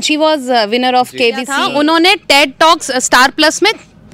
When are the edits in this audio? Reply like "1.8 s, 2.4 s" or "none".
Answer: 1.6 s

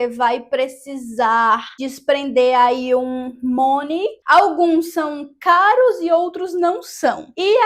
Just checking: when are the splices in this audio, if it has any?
4.2 s

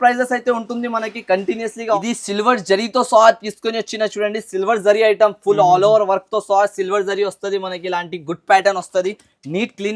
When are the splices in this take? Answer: 2.0 s

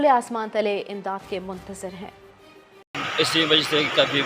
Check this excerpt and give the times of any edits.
2.8 s

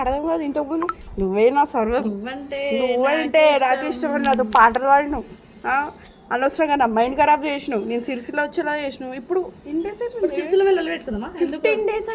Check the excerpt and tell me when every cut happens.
none

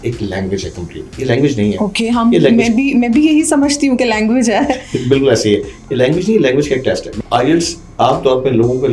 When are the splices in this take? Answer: 7.1 s

